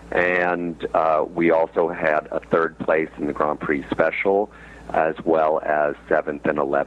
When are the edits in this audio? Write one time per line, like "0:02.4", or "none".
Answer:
none